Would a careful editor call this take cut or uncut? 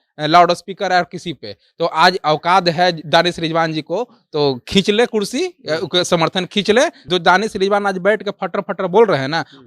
cut